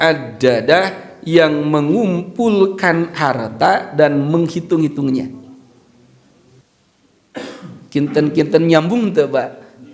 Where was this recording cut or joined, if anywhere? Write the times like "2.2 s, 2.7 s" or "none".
6.6 s